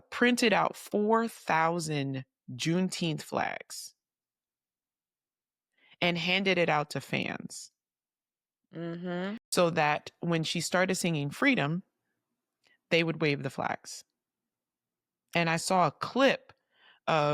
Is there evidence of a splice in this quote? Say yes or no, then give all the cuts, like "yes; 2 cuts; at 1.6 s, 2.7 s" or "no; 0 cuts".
yes; 1 cut; at 9.4 s